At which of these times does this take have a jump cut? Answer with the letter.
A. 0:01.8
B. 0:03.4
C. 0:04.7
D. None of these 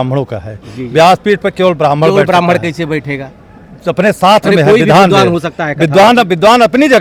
D